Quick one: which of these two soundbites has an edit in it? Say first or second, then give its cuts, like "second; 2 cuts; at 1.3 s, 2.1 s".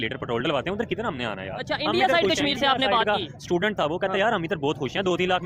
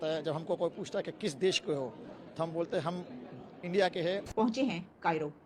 second; 1 cut; at 4.3 s